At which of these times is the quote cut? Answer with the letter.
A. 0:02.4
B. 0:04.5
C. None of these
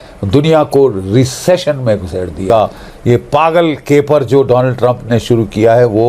A